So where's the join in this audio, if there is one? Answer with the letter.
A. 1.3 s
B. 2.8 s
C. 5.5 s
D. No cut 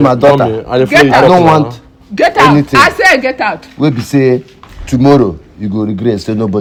D